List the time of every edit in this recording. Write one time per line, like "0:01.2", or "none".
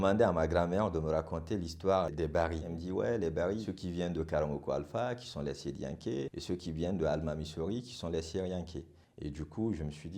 0:02.7
0:09.0